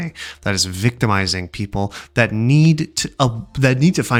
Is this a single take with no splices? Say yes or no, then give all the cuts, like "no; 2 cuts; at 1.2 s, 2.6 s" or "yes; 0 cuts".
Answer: yes; 0 cuts